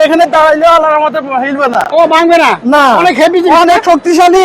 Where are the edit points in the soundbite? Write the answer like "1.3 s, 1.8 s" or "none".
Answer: none